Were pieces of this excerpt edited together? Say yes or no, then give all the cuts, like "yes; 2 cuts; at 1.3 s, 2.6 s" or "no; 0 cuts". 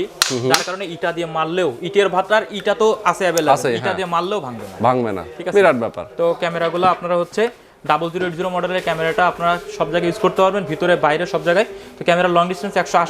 no; 0 cuts